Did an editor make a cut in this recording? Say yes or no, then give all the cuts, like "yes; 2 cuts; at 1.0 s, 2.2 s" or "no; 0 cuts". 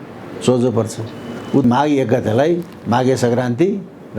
yes; 1 cut; at 1.6 s